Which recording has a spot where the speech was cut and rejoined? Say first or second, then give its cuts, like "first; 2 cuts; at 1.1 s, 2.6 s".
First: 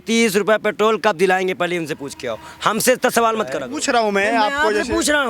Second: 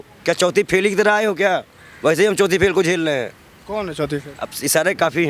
first; 1 cut; at 3.7 s